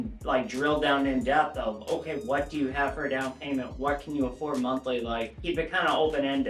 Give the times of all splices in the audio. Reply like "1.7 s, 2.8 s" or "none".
5.3 s